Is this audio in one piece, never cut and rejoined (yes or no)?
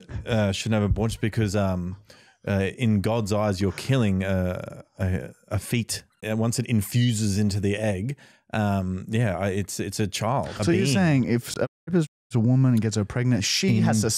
no